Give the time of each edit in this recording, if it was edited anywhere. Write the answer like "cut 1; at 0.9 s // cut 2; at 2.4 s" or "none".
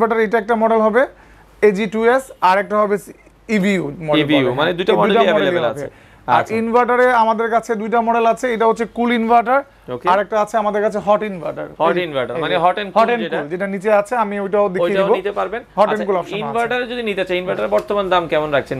none